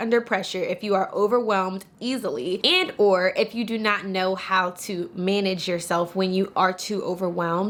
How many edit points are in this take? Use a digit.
0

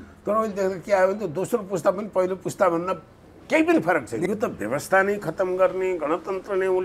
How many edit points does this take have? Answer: 1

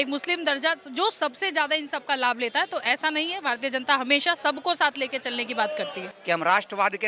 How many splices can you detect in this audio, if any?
1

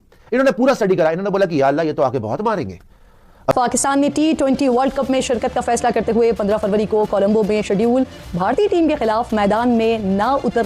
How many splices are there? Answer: 1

